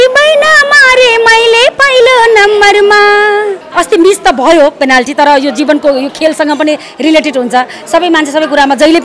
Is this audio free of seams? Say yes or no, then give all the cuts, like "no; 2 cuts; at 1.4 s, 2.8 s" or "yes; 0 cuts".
no; 1 cut; at 3.6 s